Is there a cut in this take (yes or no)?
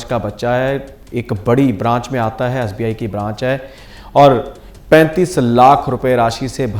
yes